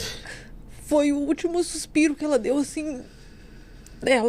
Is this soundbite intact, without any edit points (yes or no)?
yes